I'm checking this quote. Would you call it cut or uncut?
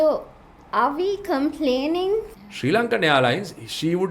cut